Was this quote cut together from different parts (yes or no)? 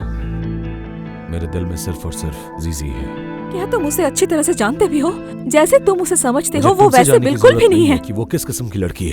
yes